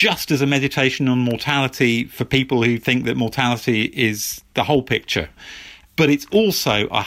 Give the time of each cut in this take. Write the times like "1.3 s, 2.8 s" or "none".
none

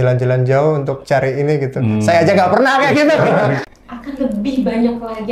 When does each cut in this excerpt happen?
3.6 s

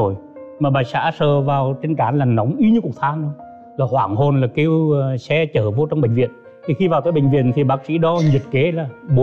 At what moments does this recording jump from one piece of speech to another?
none

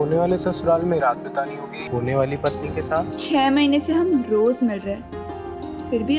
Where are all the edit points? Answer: 1.8 s, 3.1 s

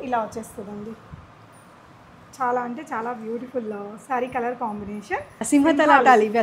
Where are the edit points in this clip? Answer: 5.3 s

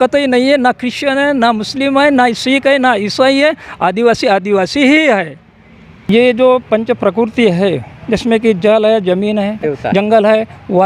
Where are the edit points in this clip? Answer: 6.0 s, 9.7 s

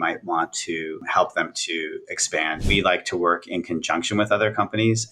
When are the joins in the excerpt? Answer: 1.0 s, 2.6 s

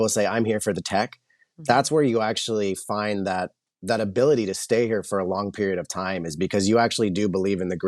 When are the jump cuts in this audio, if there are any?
3.7 s

